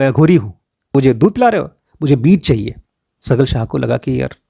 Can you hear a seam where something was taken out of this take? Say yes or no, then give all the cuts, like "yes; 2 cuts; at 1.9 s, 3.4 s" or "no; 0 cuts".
yes; 1 cut; at 0.9 s